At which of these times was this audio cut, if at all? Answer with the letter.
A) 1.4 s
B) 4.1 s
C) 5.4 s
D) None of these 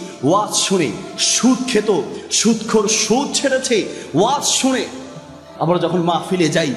C